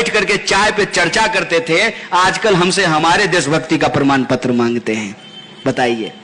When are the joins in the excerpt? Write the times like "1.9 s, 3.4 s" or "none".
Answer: none

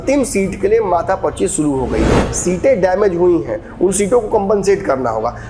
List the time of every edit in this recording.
2.2 s

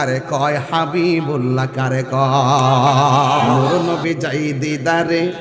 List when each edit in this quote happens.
3.6 s

